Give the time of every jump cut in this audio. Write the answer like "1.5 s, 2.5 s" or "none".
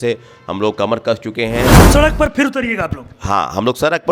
1.8 s